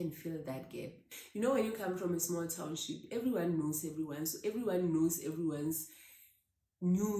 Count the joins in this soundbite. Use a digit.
1